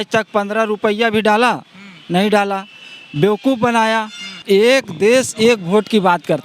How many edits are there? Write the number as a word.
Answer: one